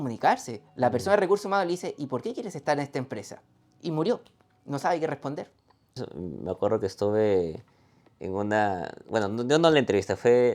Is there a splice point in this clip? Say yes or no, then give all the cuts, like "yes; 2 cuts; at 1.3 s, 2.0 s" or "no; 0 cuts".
yes; 1 cut; at 6.0 s